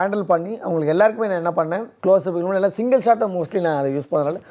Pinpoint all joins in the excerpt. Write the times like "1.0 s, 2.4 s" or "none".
1.9 s